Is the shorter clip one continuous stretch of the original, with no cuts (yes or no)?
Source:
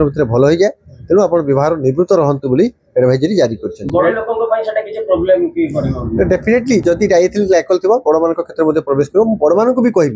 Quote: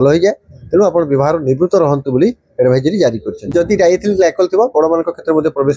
no